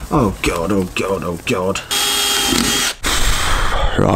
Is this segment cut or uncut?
cut